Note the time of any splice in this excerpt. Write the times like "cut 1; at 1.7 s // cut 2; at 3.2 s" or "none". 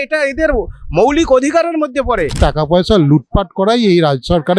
cut 1; at 2.4 s

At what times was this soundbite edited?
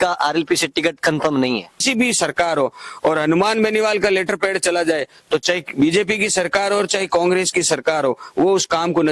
cut 1; at 1.8 s

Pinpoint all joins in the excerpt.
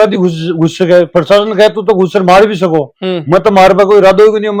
none

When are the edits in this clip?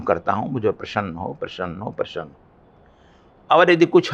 none

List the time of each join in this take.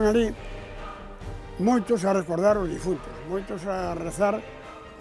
none

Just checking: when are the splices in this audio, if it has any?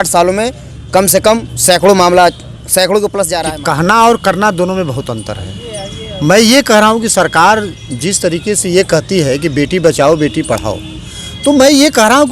cut 1; at 3.4 s

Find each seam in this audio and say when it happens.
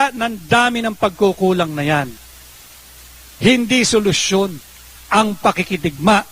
cut 1; at 1.4 s

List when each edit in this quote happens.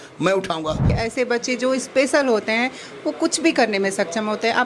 cut 1; at 1.0 s

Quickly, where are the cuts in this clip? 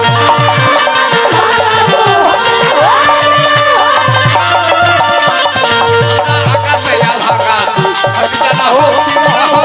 none

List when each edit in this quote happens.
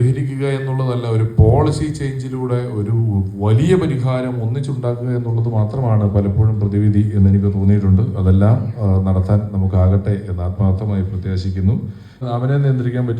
cut 1; at 12.2 s

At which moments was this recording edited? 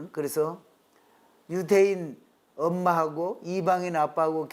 none

